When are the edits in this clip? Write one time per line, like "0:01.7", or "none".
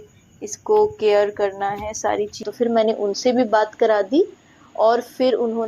0:02.5